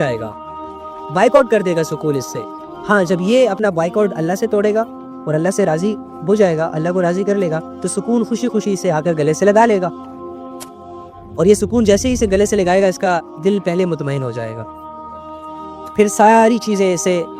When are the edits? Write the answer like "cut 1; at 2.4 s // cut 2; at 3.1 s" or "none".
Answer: cut 1; at 14.6 s // cut 2; at 15.9 s